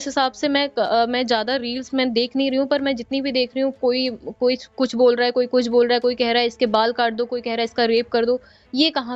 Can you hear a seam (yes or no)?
no